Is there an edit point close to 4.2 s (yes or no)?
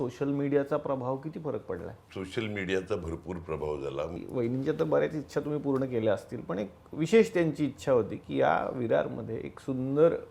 yes